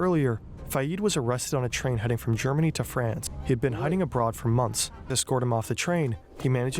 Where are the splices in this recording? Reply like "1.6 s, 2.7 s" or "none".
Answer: 3.3 s, 5.2 s